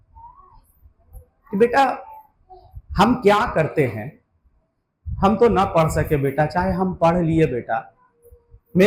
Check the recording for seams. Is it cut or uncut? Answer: uncut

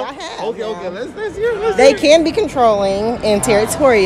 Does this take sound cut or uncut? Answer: uncut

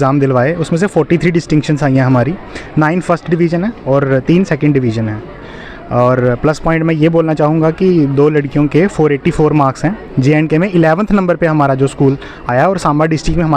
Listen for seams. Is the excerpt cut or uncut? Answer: uncut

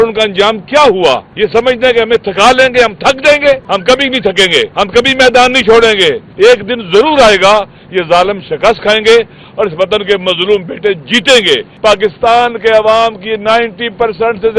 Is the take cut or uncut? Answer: cut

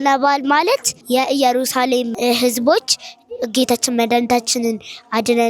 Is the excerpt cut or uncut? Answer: cut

